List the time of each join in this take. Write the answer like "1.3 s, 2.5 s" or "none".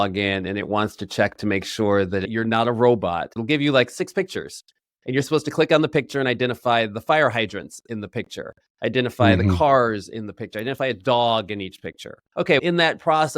2.2 s, 3.3 s, 4.9 s, 12.1 s